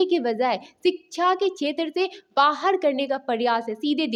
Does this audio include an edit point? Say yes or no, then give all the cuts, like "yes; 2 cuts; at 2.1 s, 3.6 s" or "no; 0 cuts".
no; 0 cuts